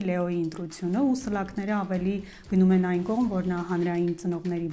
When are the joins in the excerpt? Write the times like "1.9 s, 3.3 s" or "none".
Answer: none